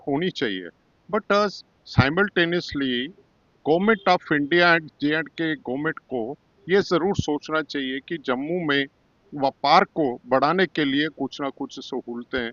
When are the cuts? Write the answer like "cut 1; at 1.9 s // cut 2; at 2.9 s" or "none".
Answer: none